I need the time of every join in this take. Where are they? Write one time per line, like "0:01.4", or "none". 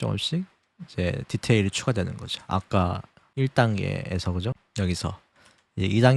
none